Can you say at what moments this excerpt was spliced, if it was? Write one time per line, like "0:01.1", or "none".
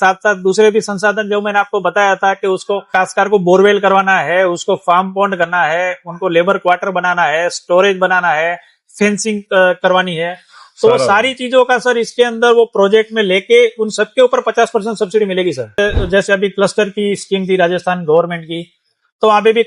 0:15.8